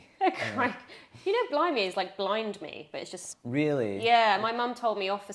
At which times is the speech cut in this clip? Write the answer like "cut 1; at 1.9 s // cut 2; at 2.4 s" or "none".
none